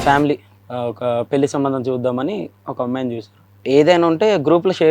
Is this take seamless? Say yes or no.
no